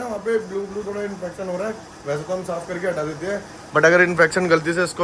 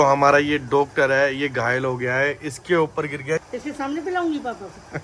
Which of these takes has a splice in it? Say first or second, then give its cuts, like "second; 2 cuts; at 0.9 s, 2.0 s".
second; 1 cut; at 3.4 s